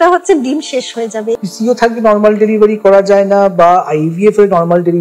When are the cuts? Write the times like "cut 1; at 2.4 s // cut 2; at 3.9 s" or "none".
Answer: cut 1; at 1.4 s